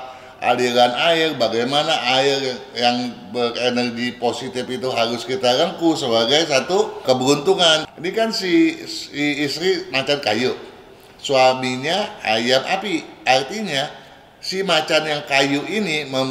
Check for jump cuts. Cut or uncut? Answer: cut